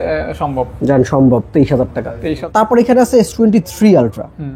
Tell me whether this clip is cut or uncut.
cut